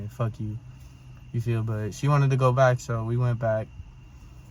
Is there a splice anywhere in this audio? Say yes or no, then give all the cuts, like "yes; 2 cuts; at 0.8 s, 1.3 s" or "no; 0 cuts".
no; 0 cuts